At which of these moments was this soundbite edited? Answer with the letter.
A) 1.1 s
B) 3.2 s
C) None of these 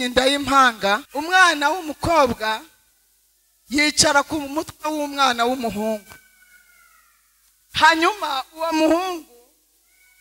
A